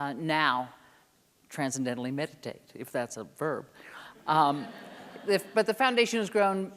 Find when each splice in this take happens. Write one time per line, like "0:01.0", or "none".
none